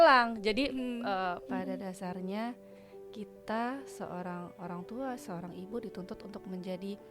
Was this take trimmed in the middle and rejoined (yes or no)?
yes